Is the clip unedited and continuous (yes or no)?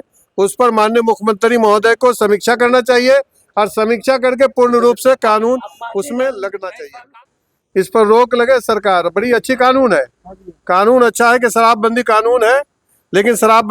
no